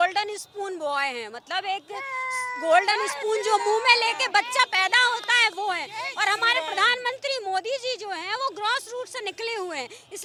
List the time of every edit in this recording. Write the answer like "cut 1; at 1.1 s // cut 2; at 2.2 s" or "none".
none